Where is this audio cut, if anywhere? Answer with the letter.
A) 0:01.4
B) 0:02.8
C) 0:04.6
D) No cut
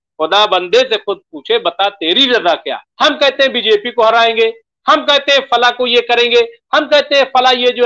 B